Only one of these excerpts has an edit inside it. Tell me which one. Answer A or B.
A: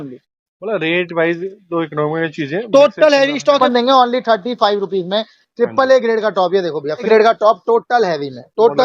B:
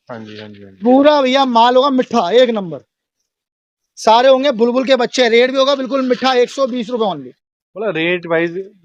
A